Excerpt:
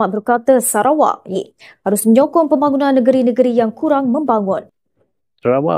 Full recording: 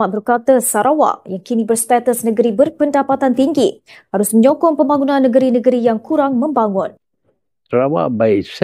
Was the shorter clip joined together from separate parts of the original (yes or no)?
yes